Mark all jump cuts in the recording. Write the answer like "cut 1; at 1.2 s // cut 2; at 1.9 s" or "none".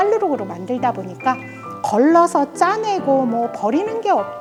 none